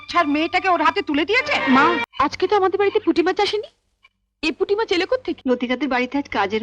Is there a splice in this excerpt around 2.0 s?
yes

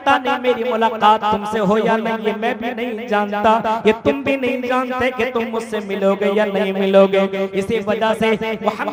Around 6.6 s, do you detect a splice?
no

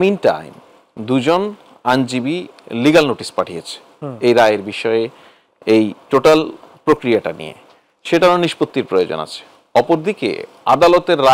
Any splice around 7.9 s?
no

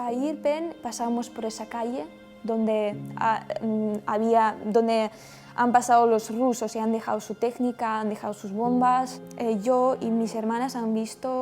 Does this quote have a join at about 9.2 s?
yes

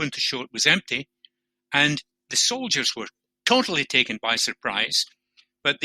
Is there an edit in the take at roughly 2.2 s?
yes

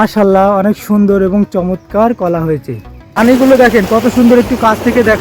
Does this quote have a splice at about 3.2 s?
yes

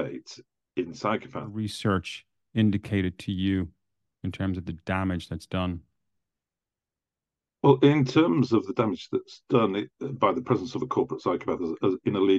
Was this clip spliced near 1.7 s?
yes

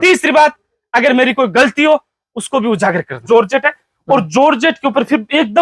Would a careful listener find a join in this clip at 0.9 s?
no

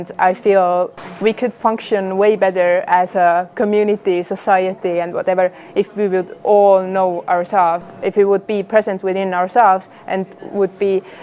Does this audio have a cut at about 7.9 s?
yes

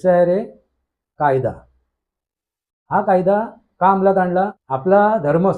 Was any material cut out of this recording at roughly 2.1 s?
no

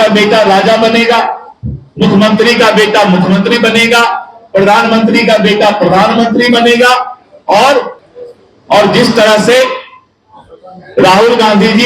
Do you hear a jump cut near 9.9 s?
no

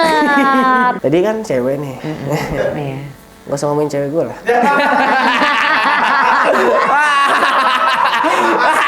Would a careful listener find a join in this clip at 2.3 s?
no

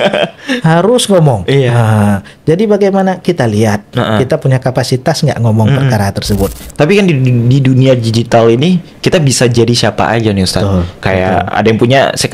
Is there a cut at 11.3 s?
no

